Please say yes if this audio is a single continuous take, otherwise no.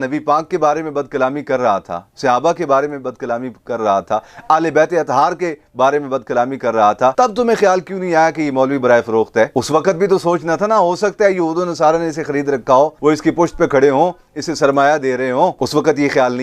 yes